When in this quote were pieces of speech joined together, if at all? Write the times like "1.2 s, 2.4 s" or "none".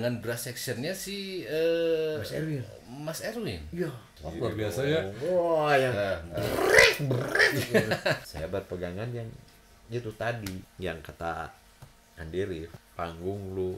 4.1 s, 8.3 s, 10.7 s, 12.8 s